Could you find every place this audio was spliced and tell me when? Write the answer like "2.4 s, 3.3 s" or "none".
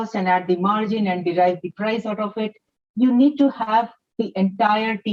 none